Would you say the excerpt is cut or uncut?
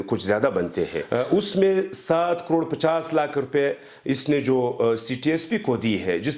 uncut